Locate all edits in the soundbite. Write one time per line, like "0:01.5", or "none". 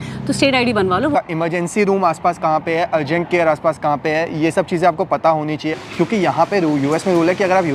0:01.1
0:05.7